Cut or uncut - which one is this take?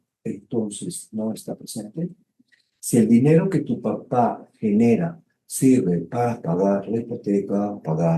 uncut